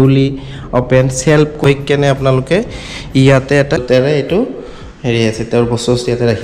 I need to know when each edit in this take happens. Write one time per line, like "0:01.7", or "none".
0:01.6
0:03.8